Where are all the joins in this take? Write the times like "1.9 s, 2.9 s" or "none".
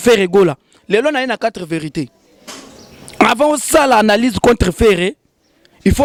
none